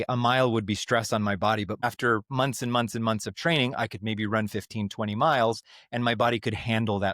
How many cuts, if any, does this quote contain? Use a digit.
1